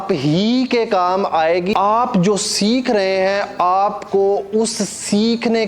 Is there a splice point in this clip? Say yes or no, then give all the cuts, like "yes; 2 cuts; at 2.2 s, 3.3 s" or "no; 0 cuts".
yes; 1 cut; at 1.7 s